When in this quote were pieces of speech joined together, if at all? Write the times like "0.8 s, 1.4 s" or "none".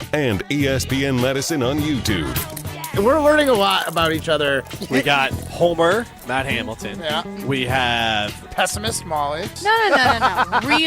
2.8 s